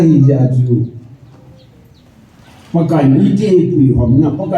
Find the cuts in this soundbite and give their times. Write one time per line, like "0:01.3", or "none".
none